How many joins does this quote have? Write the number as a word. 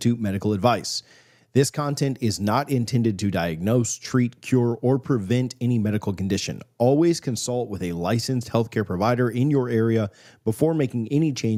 zero